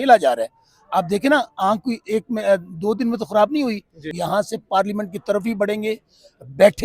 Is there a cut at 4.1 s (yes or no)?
yes